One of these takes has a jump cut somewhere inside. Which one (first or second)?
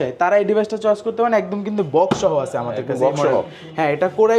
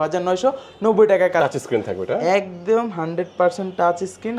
second